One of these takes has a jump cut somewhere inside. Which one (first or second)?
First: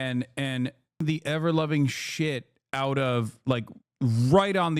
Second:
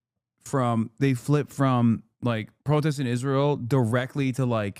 first